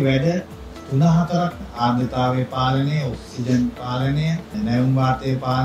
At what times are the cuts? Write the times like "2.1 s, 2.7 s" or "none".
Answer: 1.6 s, 4.5 s